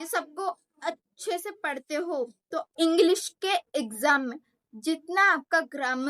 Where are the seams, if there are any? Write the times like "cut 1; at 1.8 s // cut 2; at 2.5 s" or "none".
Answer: cut 1; at 2.7 s